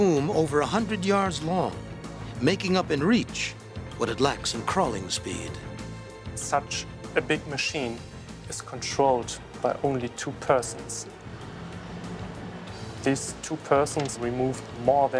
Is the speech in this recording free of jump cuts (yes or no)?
yes